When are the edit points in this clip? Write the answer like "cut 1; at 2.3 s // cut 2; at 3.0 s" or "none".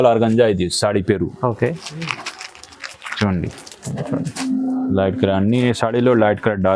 none